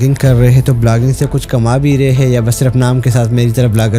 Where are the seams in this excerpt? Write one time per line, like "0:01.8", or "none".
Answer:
none